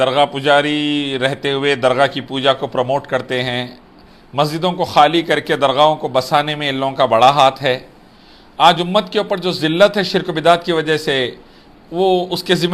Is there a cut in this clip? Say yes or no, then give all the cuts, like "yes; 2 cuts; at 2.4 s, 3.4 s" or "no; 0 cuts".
no; 0 cuts